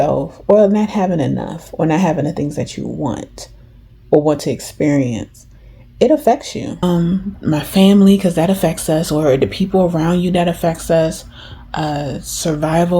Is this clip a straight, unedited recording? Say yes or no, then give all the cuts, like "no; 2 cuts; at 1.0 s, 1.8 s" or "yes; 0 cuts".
no; 1 cut; at 6.8 s